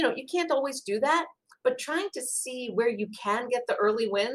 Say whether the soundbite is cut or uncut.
uncut